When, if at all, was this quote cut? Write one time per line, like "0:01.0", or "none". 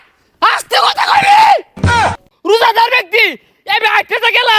0:02.0